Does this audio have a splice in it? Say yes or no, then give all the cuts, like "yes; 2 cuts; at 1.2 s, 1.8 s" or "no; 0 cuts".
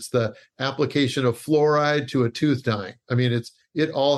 no; 0 cuts